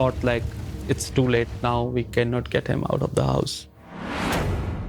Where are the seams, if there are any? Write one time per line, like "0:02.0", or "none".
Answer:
0:03.9